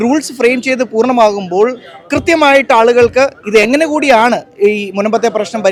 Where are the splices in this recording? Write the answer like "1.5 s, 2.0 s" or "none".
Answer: none

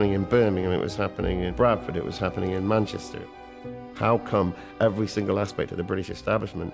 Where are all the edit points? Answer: 1.5 s, 3.6 s

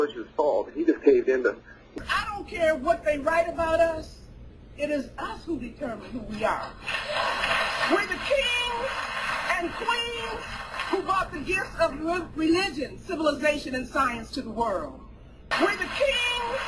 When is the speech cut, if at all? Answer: none

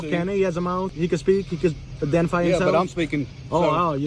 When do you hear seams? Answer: 0.9 s

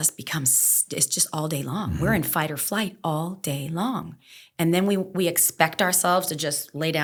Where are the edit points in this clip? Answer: none

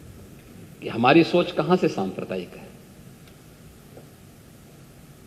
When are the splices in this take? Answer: none

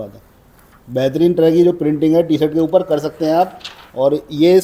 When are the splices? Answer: none

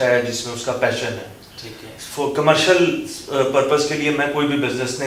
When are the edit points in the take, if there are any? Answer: none

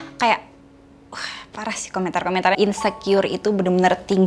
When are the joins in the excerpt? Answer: 2.6 s

